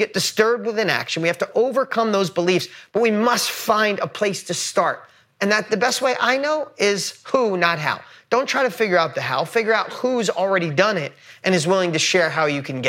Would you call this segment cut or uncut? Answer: uncut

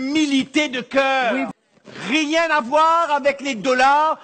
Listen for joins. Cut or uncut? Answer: cut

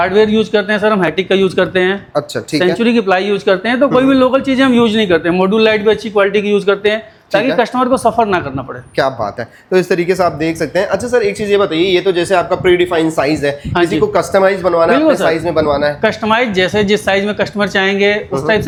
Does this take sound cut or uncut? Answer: uncut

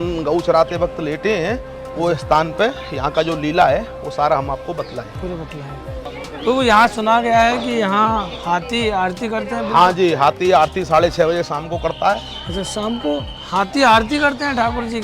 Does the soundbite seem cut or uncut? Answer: cut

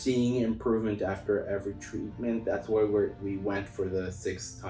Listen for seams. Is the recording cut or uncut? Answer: uncut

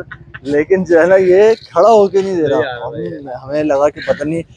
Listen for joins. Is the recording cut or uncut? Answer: uncut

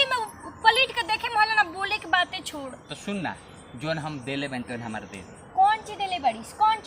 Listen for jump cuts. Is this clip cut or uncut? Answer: uncut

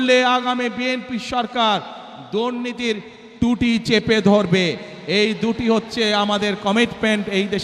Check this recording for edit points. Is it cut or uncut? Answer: uncut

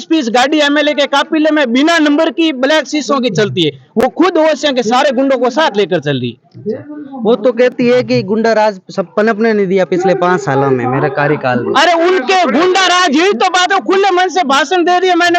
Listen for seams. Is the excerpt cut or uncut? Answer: uncut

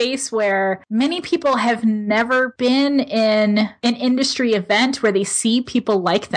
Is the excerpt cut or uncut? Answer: cut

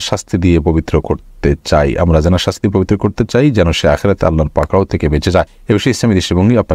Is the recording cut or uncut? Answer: cut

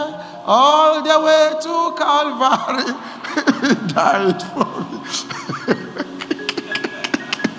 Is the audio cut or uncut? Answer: uncut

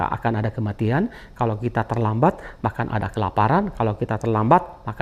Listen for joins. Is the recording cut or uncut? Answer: uncut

